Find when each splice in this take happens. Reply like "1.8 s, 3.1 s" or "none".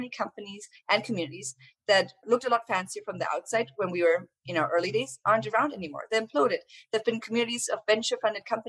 2.2 s